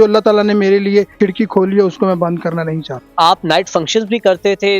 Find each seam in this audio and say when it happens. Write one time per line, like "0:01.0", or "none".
0:01.1
0:03.0